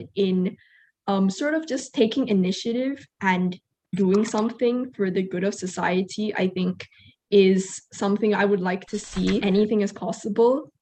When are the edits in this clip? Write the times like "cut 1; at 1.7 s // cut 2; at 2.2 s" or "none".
cut 1; at 9.4 s